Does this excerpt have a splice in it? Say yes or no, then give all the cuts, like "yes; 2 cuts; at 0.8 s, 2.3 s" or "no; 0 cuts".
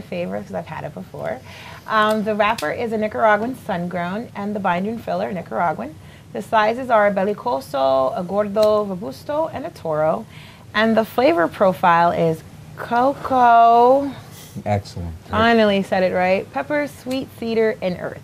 no; 0 cuts